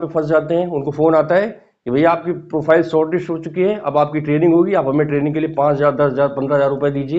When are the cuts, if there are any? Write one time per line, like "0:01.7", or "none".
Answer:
none